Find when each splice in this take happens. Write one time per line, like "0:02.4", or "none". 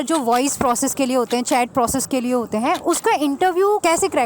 none